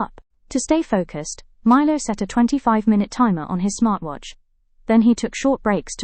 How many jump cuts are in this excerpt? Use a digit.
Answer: 0